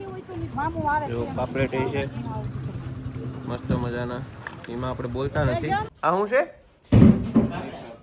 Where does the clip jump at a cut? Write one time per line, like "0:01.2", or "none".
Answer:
0:05.9